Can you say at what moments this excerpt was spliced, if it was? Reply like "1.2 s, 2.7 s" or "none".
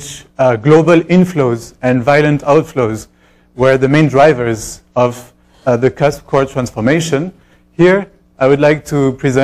2.7 s